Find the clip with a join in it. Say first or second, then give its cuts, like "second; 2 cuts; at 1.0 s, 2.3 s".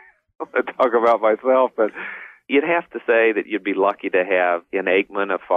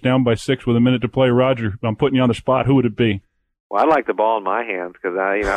first; 2 cuts; at 2.5 s, 4.6 s